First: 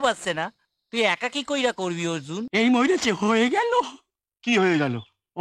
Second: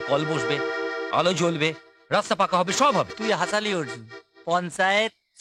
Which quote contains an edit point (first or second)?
first